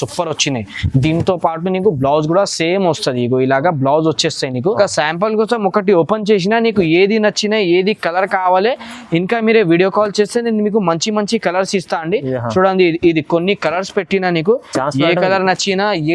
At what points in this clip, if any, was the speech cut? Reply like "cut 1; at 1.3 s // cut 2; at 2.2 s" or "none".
cut 1; at 4.8 s